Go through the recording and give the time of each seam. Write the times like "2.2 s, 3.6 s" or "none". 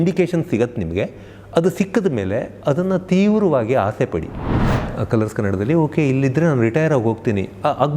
4.7 s